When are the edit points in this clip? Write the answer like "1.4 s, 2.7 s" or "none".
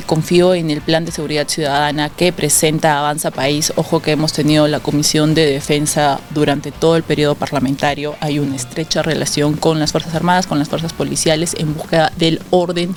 none